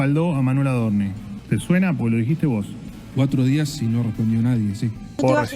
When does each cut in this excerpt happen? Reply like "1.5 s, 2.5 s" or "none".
1.3 s